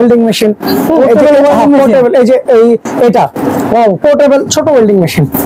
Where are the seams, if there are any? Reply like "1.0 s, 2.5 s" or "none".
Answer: none